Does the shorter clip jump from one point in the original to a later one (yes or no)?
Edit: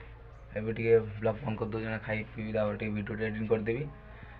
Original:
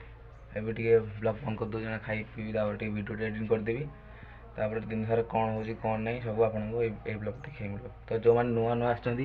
no